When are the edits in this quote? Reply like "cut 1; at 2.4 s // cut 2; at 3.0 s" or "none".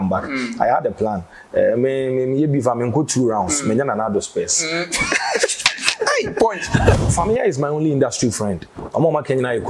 cut 1; at 7.0 s